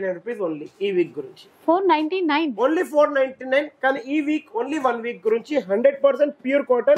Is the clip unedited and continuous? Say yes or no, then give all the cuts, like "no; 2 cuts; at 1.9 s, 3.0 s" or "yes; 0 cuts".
yes; 0 cuts